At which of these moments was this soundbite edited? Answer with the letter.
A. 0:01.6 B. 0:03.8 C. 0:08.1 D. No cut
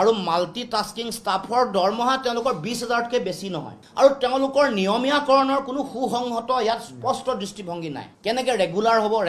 B